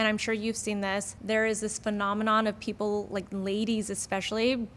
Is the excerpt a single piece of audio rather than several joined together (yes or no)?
no